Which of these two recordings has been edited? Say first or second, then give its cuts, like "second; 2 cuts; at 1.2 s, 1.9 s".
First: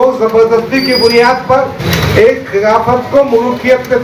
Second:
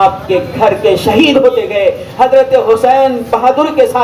first; 1 cut; at 1.8 s